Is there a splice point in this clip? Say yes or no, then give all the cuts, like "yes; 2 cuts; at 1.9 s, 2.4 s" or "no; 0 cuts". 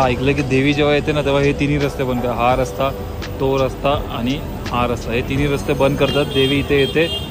no; 0 cuts